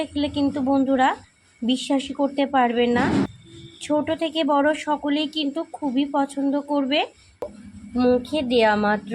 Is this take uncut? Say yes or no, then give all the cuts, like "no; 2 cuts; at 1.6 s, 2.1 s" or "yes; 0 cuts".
no; 2 cuts; at 3.3 s, 7.5 s